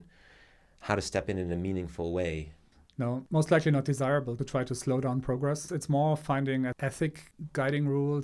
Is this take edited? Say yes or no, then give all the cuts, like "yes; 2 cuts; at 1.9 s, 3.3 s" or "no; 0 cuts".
yes; 4 cuts; at 3.2 s, 4.4 s, 5.7 s, 6.8 s